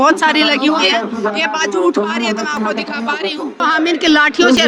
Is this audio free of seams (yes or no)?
no